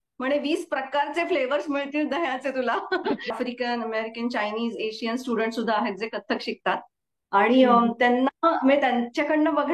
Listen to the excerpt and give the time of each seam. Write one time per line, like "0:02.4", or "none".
0:03.3